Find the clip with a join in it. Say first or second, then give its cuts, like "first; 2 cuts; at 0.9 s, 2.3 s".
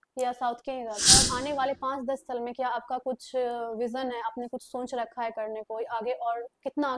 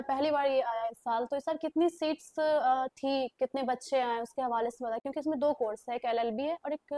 first; 1 cut; at 1.2 s